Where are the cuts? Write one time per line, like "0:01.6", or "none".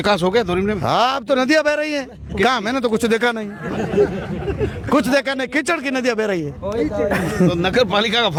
none